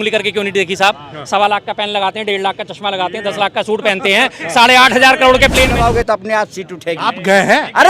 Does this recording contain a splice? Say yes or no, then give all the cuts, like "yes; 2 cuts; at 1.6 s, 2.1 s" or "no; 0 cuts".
yes; 1 cut; at 5.7 s